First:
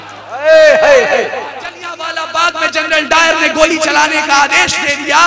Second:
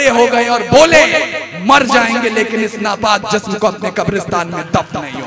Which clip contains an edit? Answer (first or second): first